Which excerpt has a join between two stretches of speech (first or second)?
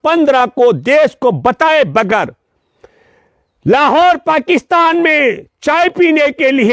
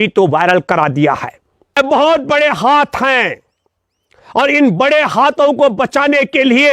second